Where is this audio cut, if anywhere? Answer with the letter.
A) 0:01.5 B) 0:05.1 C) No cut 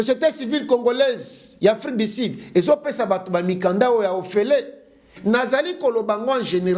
B